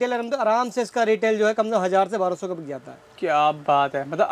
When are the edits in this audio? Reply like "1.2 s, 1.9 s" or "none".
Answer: none